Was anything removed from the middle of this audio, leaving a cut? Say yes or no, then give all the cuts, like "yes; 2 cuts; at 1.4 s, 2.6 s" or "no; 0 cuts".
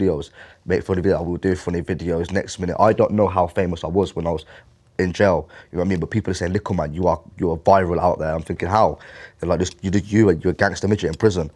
no; 0 cuts